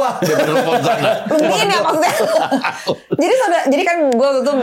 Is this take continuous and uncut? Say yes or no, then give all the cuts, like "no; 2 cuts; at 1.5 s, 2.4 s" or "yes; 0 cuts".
yes; 0 cuts